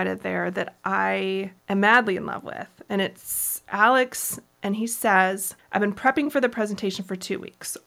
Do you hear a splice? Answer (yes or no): yes